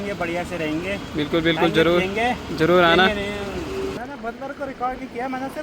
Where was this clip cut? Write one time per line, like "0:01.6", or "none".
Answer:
0:03.8